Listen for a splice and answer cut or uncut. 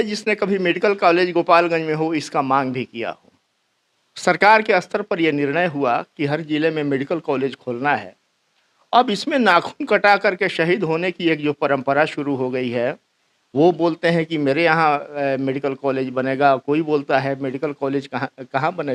uncut